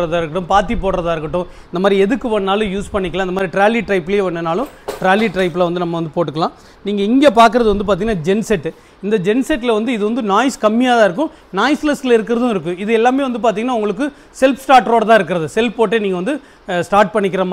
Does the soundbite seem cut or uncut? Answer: uncut